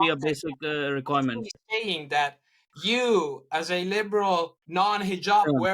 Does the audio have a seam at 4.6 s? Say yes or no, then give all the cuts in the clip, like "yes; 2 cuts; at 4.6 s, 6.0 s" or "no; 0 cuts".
yes; 1 cut; at 4.6 s